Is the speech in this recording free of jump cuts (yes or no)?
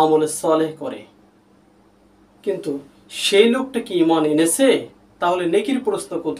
yes